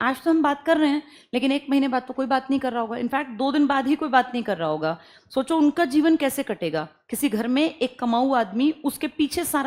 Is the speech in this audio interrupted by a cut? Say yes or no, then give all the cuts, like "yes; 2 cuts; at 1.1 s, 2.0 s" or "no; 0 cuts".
no; 0 cuts